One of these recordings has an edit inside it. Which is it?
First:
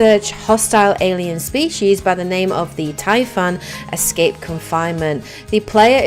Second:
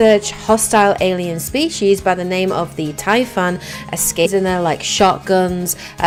first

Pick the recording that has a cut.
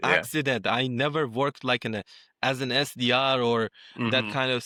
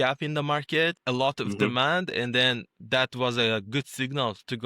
second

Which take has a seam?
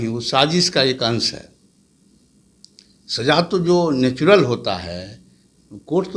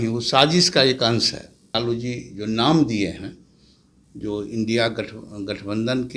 second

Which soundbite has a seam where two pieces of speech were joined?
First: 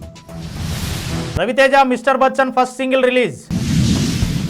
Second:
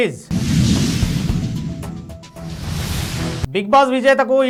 first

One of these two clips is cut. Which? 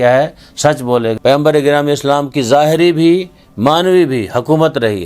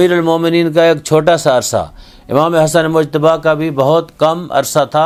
first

